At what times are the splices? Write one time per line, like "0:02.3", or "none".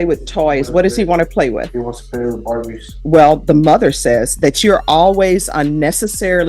0:02.9